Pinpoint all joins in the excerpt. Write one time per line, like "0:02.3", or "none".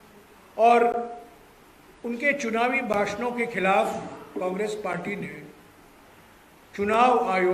none